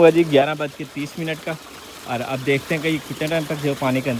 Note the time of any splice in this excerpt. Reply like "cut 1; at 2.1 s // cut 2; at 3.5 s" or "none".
none